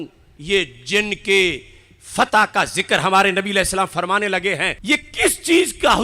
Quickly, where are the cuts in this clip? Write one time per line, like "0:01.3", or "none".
0:04.8